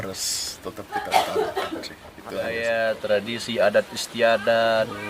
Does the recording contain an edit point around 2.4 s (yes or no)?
yes